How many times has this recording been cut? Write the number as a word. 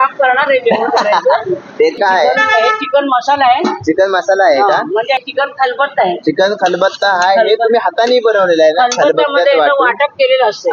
two